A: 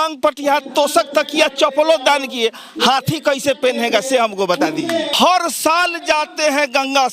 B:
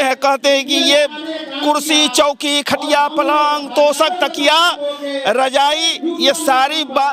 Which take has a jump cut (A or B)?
A